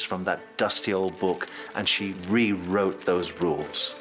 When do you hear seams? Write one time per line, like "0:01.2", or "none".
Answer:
0:02.1